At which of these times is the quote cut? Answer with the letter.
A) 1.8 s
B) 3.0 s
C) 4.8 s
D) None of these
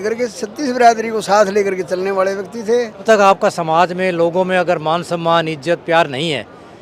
B